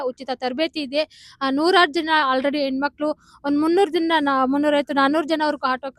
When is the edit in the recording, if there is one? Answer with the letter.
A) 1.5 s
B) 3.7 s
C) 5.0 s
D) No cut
D